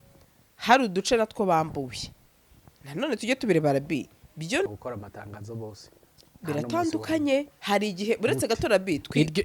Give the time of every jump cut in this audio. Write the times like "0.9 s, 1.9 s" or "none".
4.7 s